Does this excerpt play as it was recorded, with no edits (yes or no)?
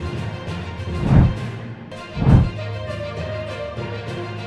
yes